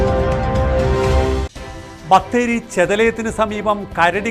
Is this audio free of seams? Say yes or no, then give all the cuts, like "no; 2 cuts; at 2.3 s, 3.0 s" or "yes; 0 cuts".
yes; 0 cuts